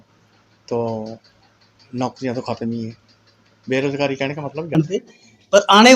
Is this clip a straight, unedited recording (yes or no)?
no